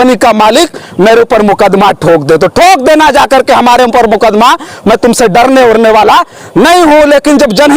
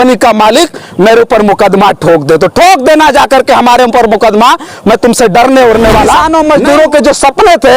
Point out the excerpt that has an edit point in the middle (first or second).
second